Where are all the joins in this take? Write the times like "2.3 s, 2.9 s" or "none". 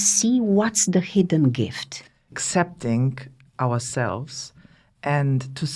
2.3 s